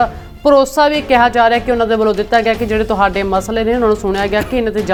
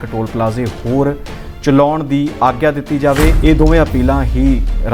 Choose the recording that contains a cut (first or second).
second